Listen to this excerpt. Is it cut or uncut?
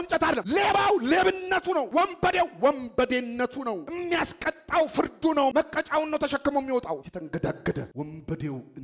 uncut